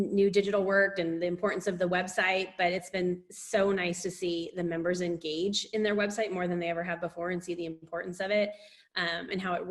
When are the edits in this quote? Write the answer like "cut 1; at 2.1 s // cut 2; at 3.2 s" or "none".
none